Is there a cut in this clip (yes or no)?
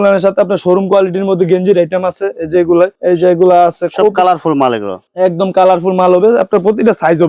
no